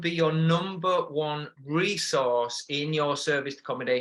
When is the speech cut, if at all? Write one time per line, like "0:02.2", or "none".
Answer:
none

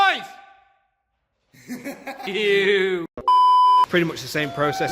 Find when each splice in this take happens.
0:03.9

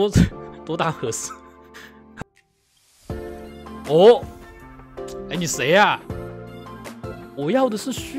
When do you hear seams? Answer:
0:02.2

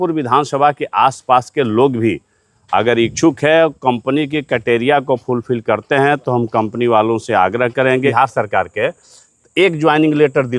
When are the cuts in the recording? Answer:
0:08.1

